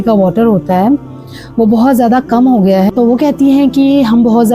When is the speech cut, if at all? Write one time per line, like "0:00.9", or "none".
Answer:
0:02.9

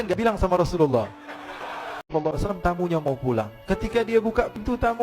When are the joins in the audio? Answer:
0:02.1

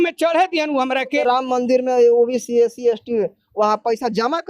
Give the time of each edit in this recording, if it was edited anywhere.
0:01.2

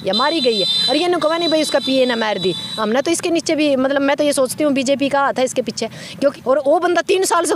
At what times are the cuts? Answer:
0:06.3

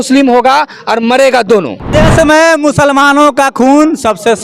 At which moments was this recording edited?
0:01.8

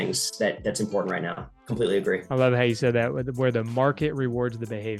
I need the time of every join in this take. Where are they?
0:02.2

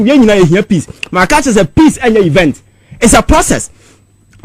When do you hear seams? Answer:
none

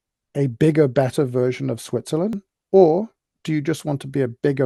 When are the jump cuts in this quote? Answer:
0:02.5

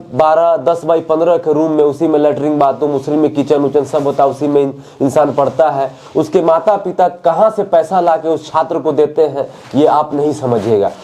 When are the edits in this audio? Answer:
none

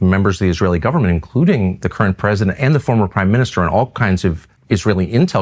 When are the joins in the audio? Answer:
0:04.5

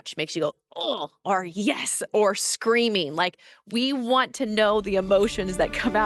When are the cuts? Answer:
none

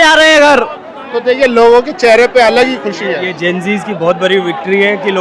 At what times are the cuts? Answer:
none

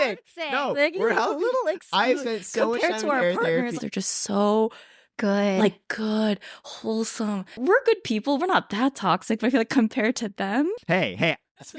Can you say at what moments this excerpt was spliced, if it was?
0:03.8
0:07.6
0:10.8

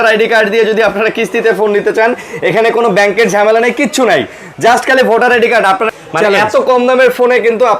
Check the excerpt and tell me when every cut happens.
0:05.9

